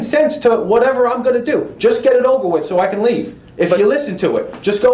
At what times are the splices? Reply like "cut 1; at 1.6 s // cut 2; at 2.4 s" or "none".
none